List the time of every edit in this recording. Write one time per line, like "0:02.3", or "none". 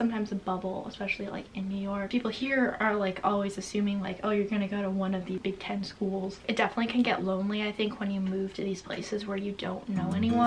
0:02.1
0:05.4
0:06.4